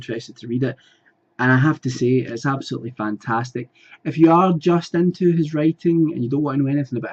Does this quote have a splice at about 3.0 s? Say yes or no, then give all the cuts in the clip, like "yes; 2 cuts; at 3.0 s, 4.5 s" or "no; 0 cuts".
no; 0 cuts